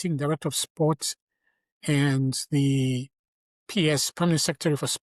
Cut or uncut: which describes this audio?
uncut